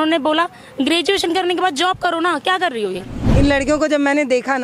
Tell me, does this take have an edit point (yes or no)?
yes